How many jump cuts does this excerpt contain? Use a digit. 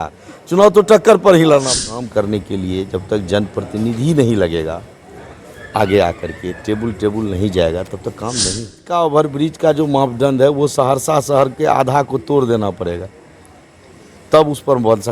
2